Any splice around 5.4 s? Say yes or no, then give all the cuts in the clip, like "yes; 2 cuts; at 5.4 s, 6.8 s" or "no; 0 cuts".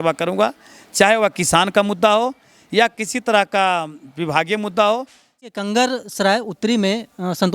yes; 1 cut; at 5.4 s